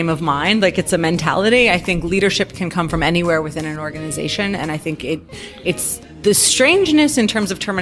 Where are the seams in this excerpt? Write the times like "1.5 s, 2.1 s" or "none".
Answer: 6.2 s